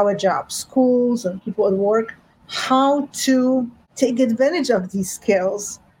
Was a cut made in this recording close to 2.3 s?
no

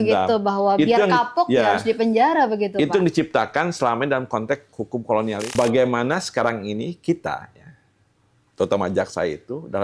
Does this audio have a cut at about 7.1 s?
no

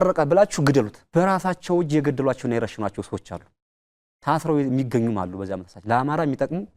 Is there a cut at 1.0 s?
yes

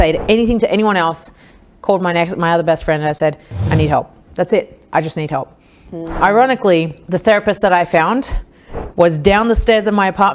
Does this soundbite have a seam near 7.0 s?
yes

